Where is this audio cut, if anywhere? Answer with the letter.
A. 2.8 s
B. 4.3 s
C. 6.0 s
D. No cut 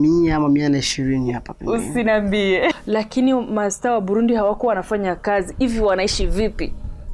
A